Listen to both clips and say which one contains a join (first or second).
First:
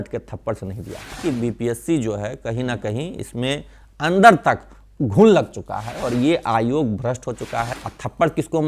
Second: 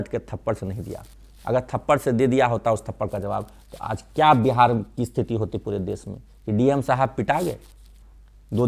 first